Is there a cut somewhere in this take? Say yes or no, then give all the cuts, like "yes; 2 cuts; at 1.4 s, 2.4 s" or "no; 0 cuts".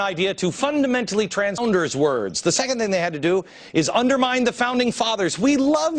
no; 0 cuts